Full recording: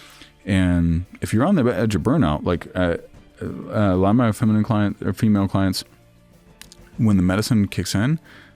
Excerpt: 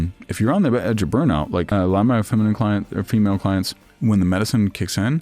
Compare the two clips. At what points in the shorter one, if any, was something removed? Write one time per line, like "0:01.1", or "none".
0:01.7
0:03.8